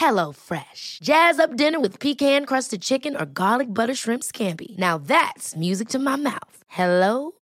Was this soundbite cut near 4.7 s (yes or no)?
no